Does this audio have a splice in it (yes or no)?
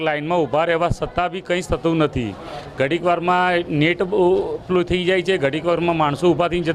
no